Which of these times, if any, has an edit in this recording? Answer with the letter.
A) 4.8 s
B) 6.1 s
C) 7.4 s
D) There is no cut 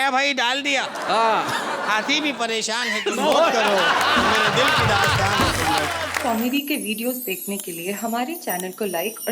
B